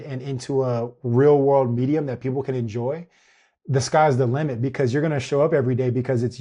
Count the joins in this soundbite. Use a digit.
0